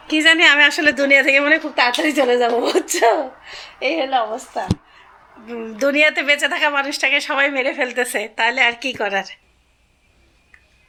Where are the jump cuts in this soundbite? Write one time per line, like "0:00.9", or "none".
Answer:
none